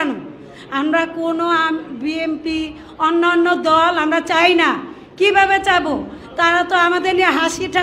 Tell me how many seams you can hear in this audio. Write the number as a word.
zero